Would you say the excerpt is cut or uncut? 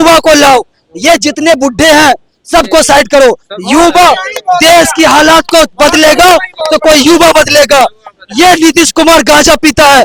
uncut